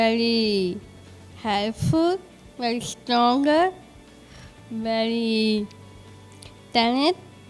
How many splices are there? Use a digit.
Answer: 0